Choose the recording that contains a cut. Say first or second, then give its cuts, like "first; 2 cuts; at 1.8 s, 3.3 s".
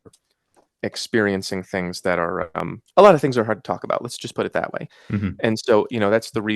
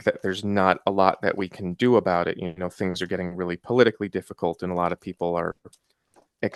first; 1 cut; at 2.8 s